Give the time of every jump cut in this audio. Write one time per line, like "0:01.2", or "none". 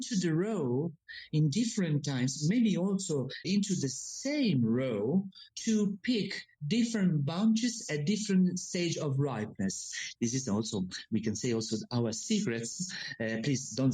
0:03.4
0:05.4
0:10.1